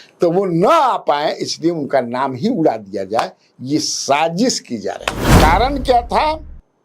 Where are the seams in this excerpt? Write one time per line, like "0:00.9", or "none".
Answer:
0:05.3